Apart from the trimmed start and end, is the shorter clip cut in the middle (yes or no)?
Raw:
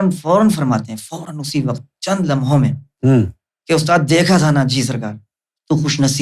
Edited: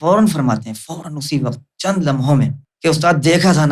yes